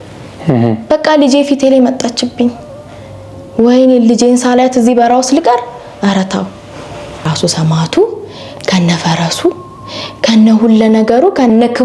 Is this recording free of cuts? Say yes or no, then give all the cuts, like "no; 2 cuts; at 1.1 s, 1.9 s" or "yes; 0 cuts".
no; 1 cut; at 7.1 s